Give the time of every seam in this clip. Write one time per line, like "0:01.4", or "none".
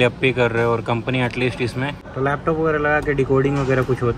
0:02.0

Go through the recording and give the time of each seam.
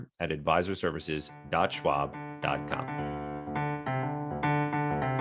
0:02.8

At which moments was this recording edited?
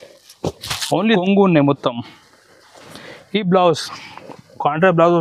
0:01.2

